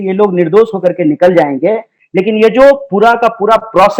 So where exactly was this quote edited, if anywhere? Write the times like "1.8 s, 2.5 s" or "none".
none